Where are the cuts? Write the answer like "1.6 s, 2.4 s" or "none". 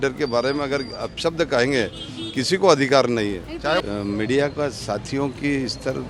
3.8 s